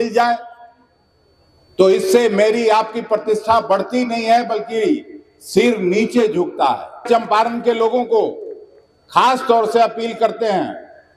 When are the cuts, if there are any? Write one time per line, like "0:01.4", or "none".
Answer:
0:07.0